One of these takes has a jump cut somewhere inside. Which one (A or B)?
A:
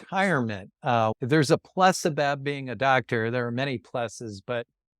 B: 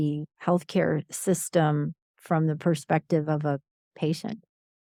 A